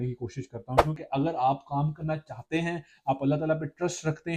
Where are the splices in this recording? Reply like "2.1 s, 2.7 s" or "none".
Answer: 1.0 s

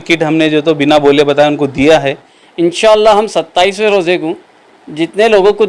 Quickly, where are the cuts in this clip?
2.3 s

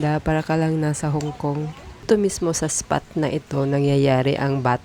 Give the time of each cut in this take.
2.1 s

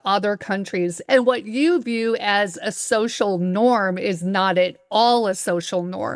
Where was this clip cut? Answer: 1.0 s

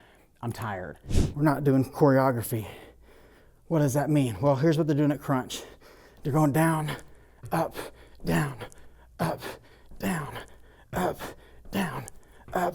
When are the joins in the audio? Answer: 1.1 s

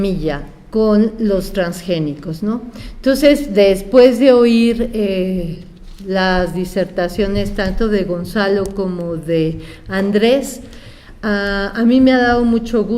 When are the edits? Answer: 12.0 s

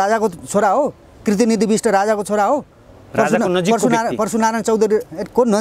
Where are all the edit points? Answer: none

